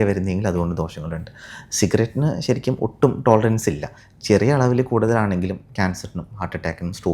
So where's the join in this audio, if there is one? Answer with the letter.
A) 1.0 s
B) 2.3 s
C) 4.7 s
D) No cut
D